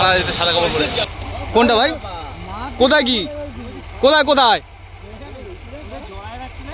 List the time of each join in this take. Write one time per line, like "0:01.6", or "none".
0:01.1